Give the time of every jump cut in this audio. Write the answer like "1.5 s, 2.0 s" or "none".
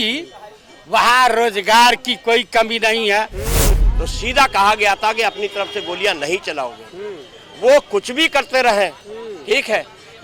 3.7 s